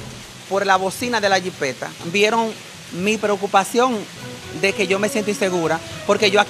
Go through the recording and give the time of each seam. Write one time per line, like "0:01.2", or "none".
0:01.9